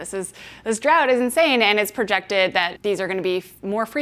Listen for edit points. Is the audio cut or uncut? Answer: cut